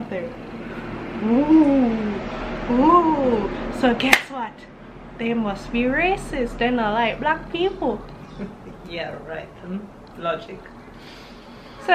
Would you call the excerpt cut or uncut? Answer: uncut